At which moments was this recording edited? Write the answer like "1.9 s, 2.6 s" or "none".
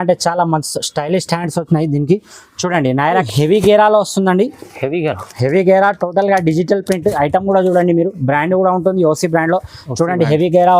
3.2 s